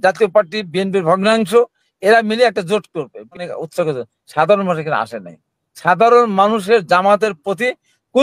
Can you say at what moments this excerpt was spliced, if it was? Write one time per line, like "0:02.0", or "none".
0:03.4